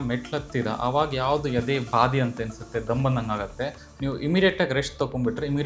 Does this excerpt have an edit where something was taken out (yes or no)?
no